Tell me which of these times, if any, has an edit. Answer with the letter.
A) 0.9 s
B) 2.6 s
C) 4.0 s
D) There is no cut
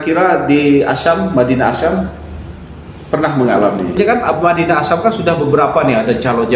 C